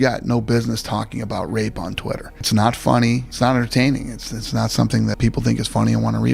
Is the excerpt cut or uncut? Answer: cut